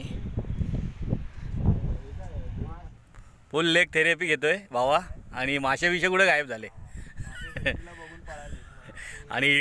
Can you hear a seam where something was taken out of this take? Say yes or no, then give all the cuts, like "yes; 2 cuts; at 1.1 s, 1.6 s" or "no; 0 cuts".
yes; 1 cut; at 2.9 s